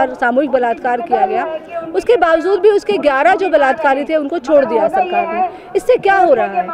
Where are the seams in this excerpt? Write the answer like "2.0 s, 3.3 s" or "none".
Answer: none